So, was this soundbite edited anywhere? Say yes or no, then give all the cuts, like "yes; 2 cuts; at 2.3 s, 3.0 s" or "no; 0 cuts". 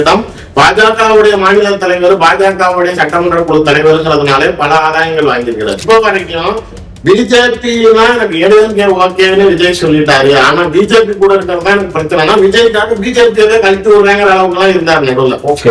yes; 1 cut; at 5.8 s